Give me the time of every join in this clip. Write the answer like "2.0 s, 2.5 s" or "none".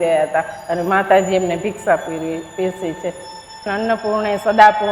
3.7 s